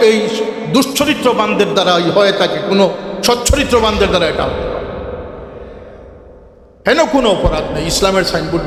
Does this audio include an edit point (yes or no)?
no